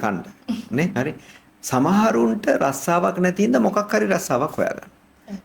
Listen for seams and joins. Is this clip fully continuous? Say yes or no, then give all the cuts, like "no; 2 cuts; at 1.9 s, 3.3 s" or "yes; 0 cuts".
no; 1 cut; at 0.9 s